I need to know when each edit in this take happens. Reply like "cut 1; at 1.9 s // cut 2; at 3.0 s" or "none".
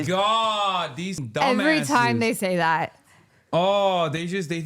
cut 1; at 1.2 s